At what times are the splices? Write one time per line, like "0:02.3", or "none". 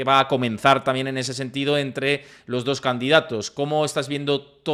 none